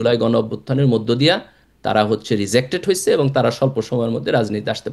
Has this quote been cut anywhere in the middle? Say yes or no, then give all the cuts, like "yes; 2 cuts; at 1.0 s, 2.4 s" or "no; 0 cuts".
no; 0 cuts